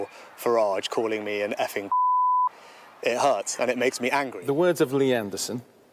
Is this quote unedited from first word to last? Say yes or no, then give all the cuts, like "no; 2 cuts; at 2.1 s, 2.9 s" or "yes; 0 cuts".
no; 1 cut; at 4.3 s